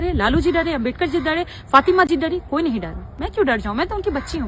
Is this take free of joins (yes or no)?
yes